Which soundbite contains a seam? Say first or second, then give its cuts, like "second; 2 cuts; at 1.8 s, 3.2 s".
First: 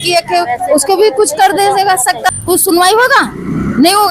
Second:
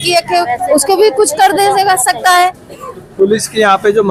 first; 1 cut; at 2.3 s